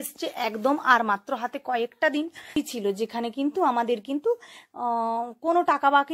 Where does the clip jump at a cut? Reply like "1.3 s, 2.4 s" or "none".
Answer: 2.6 s